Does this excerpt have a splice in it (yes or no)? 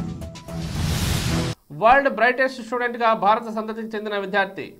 yes